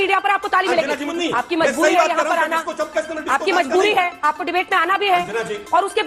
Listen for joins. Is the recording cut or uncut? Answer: cut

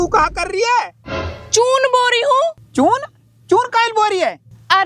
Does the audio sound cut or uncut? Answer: cut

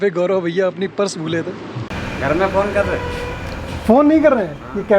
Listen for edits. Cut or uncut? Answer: cut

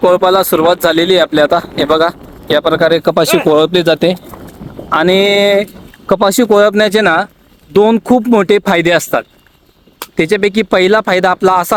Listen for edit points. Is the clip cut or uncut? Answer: uncut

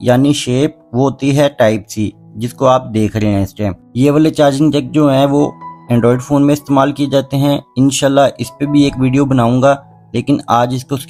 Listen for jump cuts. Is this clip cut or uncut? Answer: uncut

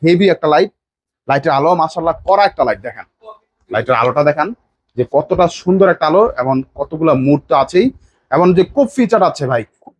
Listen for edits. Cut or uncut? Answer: uncut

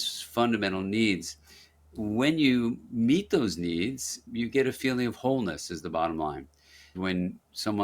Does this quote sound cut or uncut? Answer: cut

